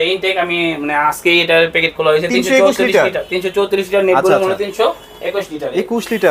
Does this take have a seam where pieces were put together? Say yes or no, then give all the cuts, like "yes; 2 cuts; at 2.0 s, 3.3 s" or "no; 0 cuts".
no; 0 cuts